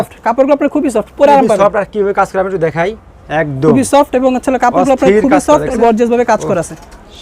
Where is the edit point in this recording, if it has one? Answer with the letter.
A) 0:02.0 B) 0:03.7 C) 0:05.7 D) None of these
C